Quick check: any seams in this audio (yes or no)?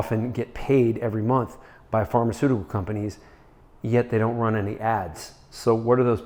no